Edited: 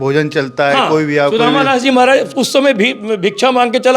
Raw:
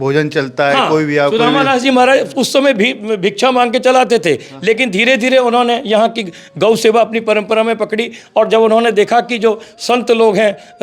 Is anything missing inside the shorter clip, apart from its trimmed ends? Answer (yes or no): no